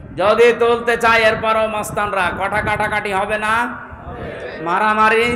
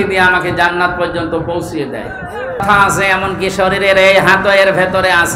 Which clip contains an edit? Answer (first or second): second